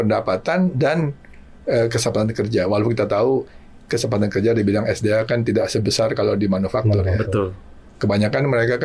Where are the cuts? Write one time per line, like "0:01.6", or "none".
none